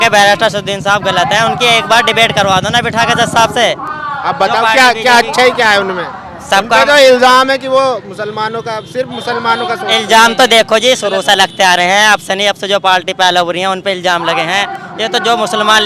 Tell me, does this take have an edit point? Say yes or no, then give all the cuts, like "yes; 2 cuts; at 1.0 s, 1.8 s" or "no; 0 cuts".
no; 0 cuts